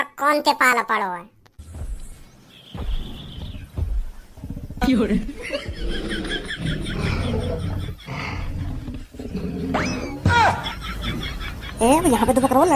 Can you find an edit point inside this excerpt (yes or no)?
no